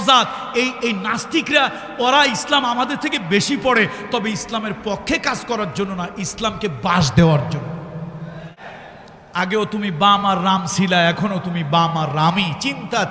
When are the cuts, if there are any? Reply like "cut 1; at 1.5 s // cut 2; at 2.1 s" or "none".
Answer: cut 1; at 8.7 s